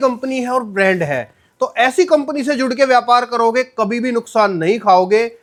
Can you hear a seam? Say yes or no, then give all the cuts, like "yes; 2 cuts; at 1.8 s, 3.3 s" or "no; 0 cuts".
no; 0 cuts